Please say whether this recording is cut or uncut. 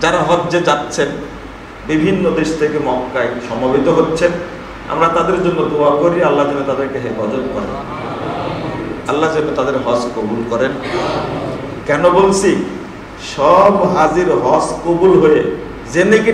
uncut